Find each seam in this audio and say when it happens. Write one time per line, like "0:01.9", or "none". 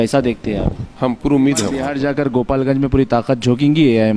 0:01.8